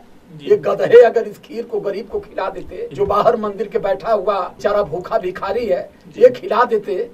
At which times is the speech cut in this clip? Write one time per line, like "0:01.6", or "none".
0:02.9
0:04.5